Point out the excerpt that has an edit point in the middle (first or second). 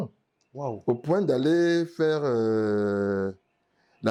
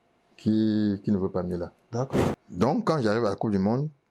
second